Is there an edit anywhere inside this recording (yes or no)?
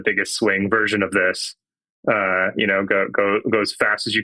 no